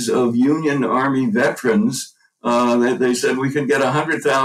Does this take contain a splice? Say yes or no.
no